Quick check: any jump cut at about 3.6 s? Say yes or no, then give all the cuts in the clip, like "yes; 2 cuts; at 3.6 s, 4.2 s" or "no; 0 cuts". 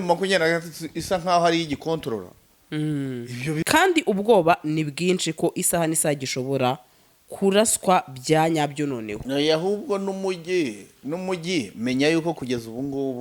yes; 1 cut; at 3.6 s